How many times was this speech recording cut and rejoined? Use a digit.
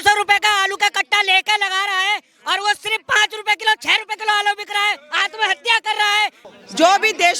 1